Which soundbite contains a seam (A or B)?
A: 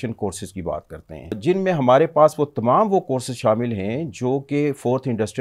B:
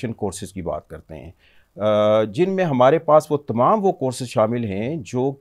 A